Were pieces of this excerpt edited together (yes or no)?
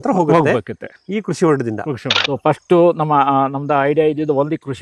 yes